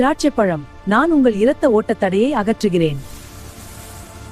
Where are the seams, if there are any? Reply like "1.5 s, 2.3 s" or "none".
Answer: none

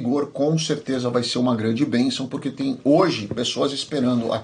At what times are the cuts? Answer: none

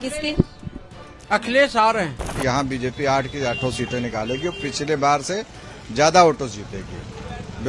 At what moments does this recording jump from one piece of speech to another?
2.3 s

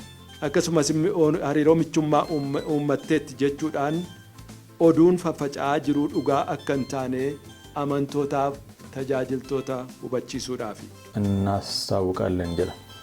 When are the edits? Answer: 11.0 s

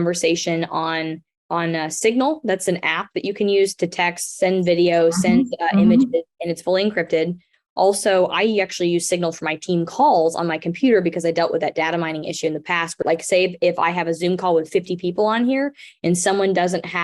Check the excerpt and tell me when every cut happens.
13.0 s

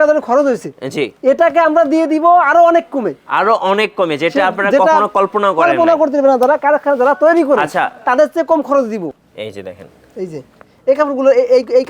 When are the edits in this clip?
1.1 s, 9.1 s

